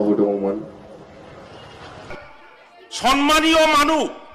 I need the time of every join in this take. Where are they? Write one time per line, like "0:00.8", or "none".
0:02.1